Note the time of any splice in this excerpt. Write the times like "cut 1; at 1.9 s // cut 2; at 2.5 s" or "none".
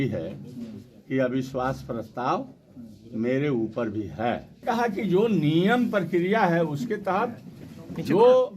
cut 1; at 4.5 s